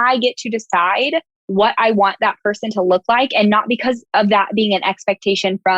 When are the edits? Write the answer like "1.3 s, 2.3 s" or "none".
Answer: 4.0 s